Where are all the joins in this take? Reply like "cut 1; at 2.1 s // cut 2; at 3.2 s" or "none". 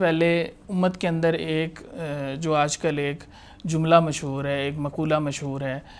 none